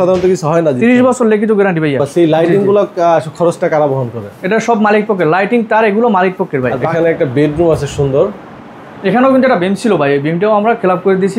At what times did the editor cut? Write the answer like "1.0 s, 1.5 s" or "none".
2.0 s, 6.8 s